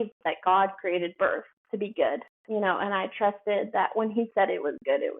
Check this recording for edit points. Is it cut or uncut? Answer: cut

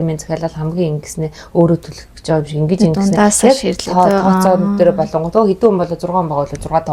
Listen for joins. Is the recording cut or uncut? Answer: uncut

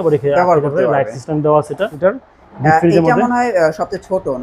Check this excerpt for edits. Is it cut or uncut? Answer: cut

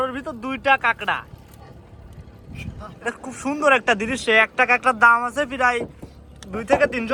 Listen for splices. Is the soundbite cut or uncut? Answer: uncut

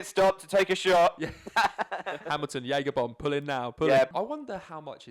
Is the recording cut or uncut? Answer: cut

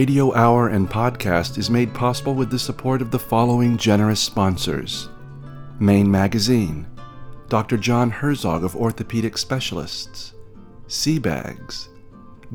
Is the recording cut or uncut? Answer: uncut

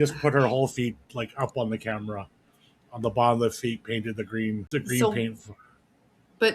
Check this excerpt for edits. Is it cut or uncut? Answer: cut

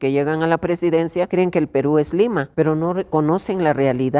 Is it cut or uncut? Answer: cut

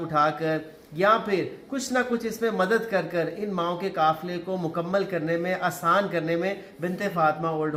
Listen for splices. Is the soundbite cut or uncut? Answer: uncut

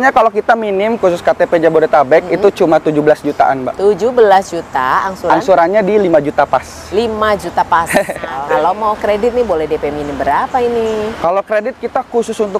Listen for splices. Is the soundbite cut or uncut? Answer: cut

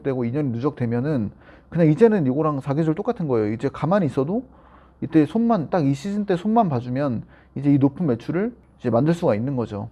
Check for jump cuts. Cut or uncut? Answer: cut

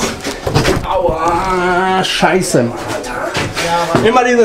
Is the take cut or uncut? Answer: uncut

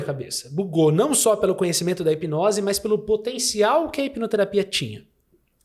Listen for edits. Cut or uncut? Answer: uncut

